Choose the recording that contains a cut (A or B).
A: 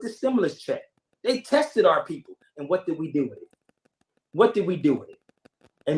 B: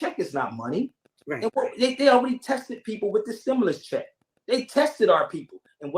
B